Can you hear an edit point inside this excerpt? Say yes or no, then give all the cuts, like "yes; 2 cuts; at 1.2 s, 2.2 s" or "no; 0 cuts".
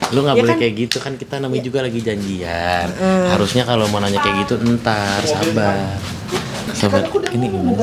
yes; 1 cut; at 6.7 s